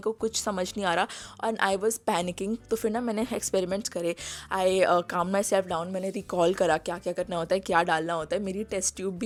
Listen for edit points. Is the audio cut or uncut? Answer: uncut